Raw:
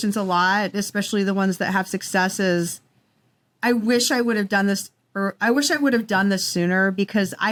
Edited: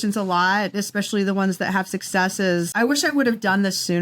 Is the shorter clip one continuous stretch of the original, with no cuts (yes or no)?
no